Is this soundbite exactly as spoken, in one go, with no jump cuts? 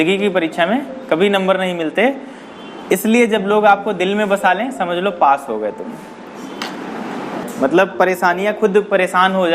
no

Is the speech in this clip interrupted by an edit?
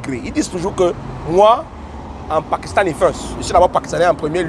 no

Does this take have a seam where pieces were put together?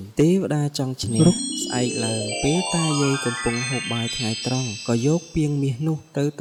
no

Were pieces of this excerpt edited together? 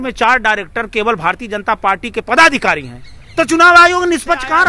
no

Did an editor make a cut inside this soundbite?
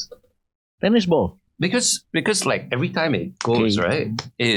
no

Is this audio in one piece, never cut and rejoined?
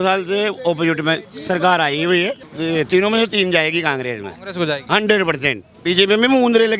no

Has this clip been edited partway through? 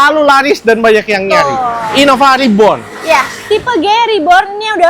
no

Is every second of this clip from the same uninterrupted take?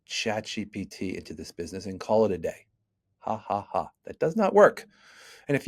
yes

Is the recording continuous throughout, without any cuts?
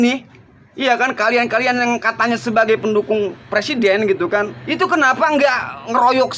no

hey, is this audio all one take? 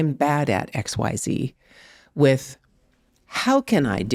yes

